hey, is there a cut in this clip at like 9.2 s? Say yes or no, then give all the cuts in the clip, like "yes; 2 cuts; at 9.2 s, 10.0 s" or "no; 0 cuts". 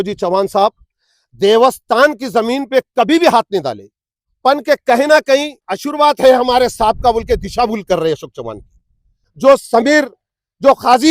yes; 1 cut; at 9.2 s